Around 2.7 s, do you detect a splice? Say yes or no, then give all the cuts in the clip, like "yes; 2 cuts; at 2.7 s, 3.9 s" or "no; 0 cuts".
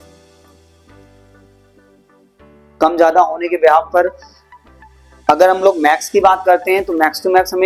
yes; 1 cut; at 2.7 s